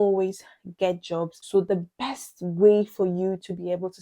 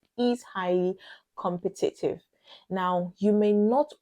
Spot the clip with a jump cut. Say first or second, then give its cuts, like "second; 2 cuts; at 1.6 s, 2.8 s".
first; 1 cut; at 1.4 s